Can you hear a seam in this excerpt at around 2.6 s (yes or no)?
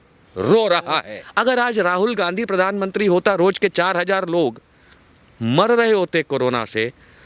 no